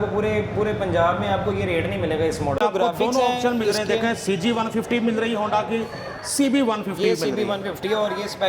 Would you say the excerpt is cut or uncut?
cut